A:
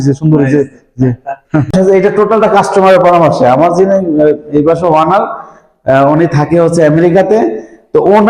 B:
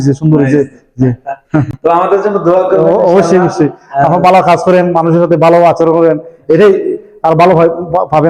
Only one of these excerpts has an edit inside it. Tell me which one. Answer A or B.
A